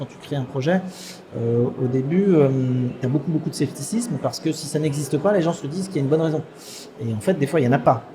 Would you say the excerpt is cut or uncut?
uncut